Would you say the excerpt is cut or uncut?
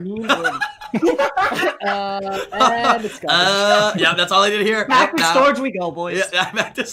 uncut